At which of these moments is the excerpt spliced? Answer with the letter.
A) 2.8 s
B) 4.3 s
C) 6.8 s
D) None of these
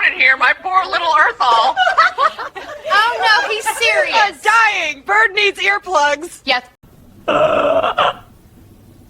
C